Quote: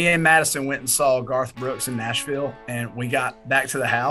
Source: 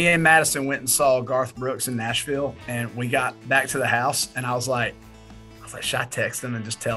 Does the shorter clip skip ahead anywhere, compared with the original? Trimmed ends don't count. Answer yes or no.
no